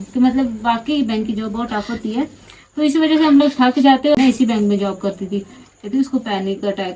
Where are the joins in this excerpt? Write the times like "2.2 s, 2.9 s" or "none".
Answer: 4.2 s